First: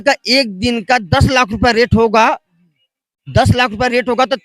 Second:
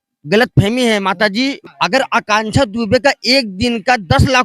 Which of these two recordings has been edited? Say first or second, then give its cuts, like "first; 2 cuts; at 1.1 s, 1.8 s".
second; 1 cut; at 1.6 s